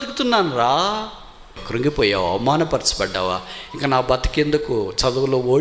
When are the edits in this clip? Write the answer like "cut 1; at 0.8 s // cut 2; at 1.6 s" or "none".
cut 1; at 1.6 s